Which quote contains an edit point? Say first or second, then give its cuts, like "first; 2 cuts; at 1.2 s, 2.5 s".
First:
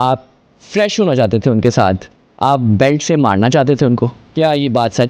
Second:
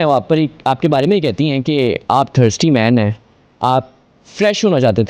first; 1 cut; at 4.2 s